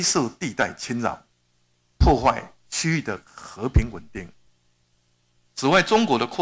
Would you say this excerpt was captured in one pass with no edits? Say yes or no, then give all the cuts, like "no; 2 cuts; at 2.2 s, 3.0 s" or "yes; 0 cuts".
yes; 0 cuts